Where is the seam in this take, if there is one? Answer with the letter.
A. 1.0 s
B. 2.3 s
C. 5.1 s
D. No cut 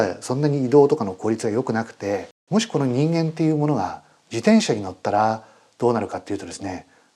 B